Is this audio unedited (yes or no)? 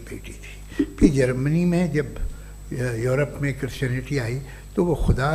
yes